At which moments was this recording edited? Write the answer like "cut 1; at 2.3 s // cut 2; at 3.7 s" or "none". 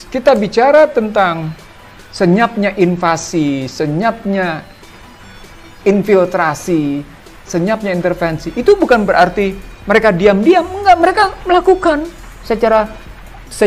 none